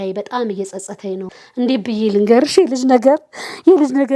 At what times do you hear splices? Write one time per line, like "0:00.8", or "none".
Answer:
0:01.3